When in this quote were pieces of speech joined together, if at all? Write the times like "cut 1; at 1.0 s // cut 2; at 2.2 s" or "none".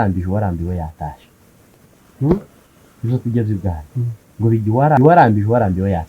cut 1; at 5.0 s